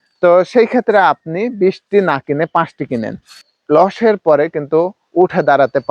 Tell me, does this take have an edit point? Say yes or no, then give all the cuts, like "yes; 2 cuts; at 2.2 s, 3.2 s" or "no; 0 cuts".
yes; 1 cut; at 3.4 s